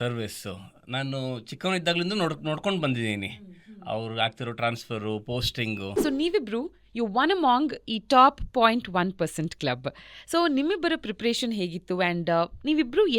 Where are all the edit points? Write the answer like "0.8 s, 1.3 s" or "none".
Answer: 5.9 s